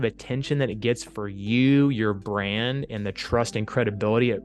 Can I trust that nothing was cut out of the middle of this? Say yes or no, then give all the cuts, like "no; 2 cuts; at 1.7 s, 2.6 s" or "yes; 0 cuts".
yes; 0 cuts